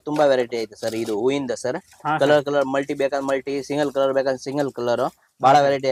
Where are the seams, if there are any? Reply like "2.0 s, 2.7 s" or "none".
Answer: none